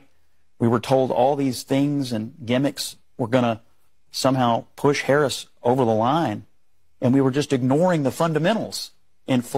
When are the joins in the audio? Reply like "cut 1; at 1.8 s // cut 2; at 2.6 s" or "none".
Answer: none